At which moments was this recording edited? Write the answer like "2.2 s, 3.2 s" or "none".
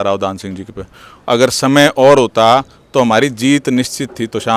none